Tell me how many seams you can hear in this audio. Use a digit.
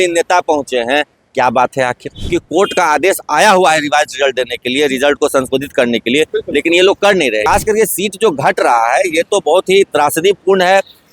2